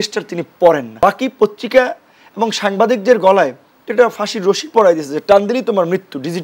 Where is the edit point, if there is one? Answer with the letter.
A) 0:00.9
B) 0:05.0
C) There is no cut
A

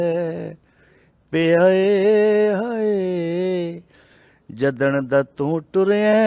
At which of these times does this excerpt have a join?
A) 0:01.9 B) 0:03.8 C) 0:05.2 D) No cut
D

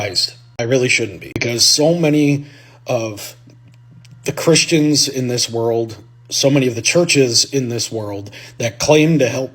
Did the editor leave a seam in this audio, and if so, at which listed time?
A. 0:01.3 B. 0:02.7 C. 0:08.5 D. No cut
A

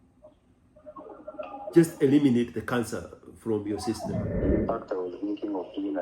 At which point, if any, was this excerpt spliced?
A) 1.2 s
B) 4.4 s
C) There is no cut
B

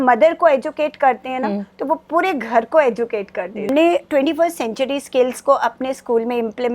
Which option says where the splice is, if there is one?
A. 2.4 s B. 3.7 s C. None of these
B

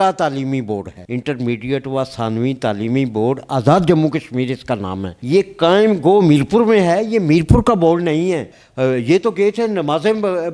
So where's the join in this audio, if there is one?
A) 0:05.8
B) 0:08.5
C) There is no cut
B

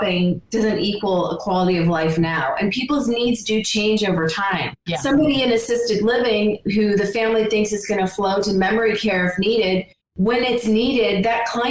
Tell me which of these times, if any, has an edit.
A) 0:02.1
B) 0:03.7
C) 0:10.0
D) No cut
C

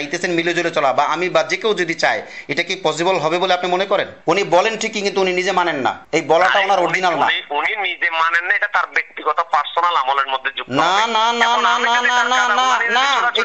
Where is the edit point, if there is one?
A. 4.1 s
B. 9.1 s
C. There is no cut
A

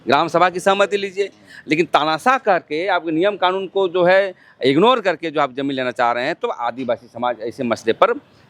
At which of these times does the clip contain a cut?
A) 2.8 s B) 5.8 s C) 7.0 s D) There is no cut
D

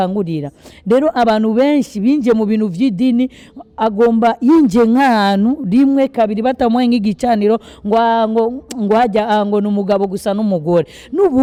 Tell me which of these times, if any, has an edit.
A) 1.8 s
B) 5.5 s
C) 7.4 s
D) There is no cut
D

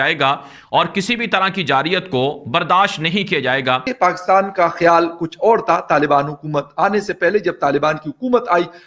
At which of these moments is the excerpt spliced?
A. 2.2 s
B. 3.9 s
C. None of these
B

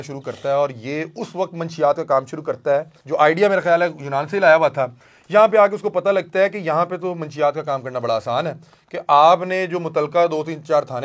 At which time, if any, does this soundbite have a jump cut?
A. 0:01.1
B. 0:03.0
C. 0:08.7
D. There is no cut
B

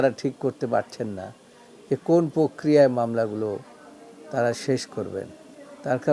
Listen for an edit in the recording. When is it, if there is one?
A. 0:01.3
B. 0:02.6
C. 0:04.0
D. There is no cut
D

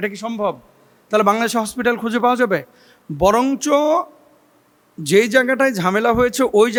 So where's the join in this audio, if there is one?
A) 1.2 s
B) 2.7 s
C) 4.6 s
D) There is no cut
D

